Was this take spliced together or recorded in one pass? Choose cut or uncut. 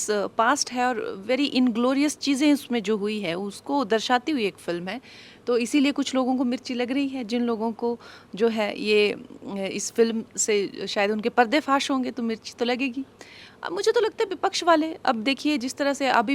uncut